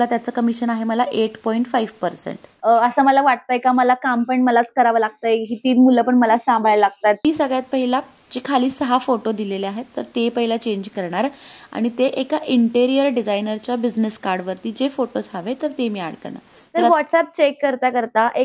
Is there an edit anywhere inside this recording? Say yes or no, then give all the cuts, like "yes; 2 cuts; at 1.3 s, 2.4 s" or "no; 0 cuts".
yes; 3 cuts; at 2.7 s, 7.2 s, 16.9 s